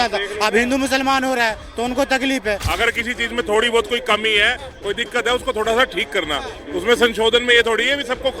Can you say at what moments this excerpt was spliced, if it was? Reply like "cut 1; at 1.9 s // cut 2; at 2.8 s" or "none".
cut 1; at 2.7 s